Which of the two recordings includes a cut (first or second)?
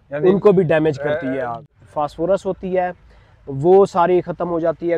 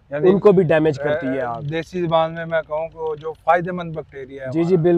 first